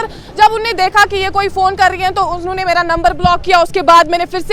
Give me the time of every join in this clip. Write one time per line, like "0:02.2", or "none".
none